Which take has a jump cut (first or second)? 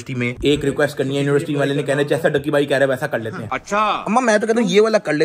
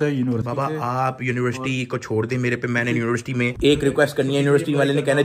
first